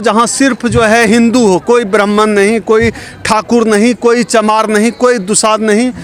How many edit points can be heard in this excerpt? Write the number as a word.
zero